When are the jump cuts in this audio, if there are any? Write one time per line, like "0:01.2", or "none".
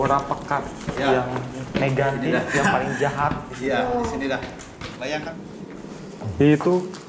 0:05.3